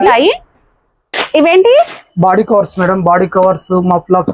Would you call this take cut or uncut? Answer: uncut